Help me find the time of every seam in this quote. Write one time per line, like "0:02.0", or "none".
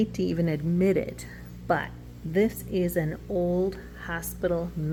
none